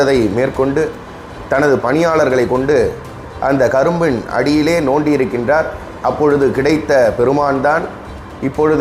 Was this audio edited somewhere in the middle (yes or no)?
no